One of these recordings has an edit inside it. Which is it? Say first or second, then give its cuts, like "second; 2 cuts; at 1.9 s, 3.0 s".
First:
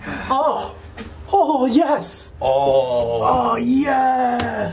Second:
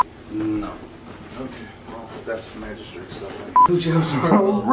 second; 1 cut; at 3.7 s